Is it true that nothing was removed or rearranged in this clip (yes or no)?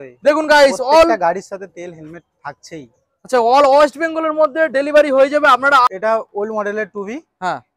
no